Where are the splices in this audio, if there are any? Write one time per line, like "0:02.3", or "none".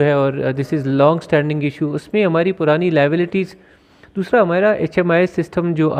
none